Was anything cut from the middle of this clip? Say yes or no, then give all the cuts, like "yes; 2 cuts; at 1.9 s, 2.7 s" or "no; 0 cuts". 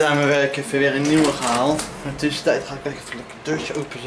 no; 0 cuts